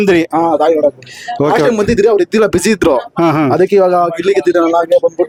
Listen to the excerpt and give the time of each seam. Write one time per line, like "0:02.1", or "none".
none

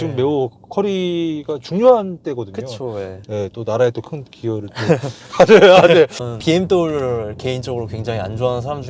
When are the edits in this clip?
0:06.2

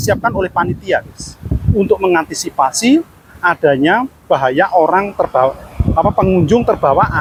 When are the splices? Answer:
none

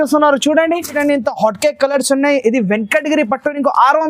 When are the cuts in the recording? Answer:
0:01.0

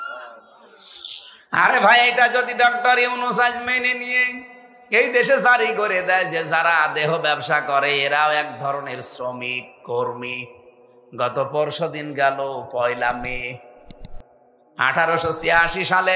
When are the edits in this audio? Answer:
none

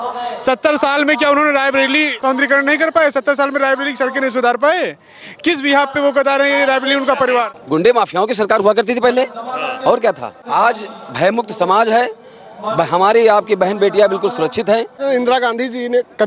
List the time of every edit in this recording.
0:02.2
0:07.5
0:10.4
0:15.0

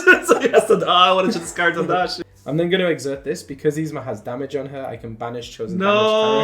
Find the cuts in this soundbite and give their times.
0:02.2

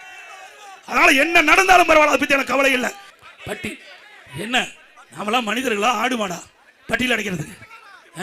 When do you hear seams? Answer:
0:03.1

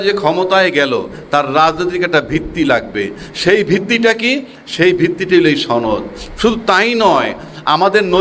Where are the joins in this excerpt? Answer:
none

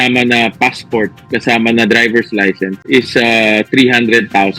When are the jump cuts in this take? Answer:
0:02.7

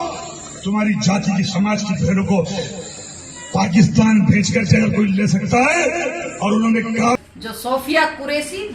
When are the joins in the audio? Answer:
0:07.2

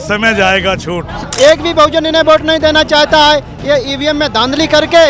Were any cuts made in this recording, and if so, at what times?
0:01.2

